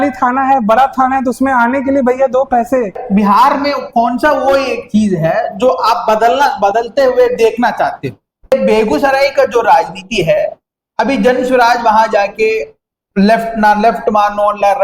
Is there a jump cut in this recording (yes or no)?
yes